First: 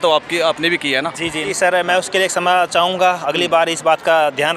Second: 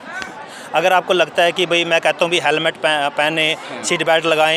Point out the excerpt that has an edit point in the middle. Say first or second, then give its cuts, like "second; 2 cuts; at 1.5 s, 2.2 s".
first; 1 cut; at 1.4 s